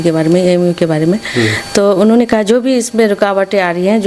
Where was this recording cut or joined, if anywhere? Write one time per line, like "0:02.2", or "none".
none